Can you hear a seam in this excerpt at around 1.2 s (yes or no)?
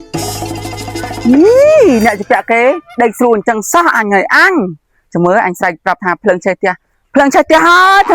yes